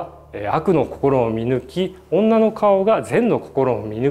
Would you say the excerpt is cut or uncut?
uncut